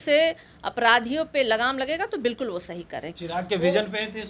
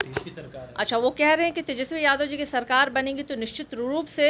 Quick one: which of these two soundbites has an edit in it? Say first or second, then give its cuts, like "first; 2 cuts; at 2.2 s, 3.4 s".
first; 1 cut; at 3.1 s